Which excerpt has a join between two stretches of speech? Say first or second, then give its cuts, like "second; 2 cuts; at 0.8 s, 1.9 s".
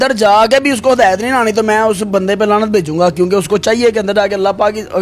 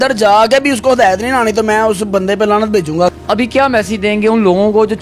second; 1 cut; at 3.1 s